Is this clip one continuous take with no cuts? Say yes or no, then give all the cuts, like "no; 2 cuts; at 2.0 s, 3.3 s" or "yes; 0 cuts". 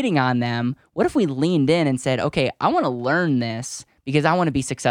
yes; 0 cuts